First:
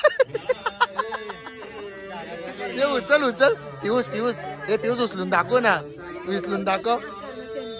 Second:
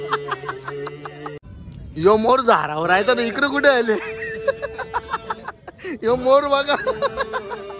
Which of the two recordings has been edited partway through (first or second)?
second